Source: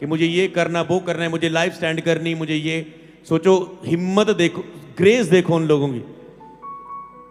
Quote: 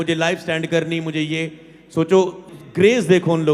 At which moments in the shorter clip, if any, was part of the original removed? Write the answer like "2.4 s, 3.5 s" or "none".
2.4 s